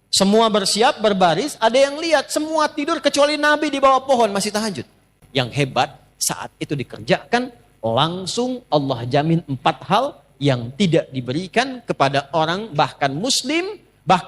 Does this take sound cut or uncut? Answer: cut